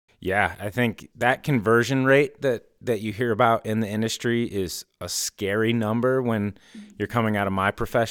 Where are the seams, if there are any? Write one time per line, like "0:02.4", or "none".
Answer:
0:01.0